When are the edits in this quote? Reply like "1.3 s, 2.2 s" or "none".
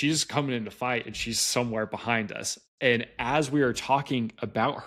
none